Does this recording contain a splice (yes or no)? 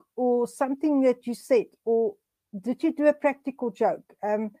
no